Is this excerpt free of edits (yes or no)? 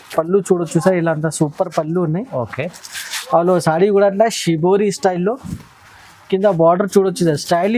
yes